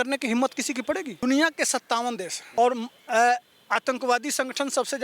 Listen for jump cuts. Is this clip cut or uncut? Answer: cut